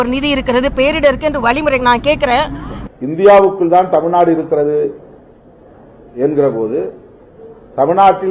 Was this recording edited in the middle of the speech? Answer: yes; 1 cut; at 2.7 s

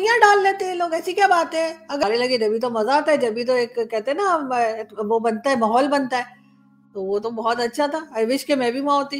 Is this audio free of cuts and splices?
no; 1 cut; at 2.0 s

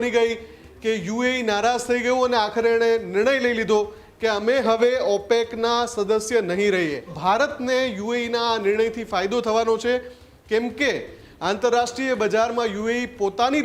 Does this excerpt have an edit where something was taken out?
yes; 1 cut; at 7.1 s

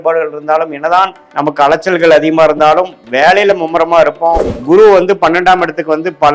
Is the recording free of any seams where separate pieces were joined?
no; 2 cuts; at 1.2 s, 4.5 s

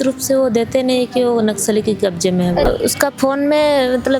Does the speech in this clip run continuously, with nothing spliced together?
no; 1 cut; at 2.7 s

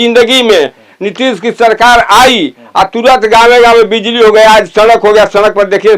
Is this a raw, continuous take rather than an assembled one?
yes; 0 cuts

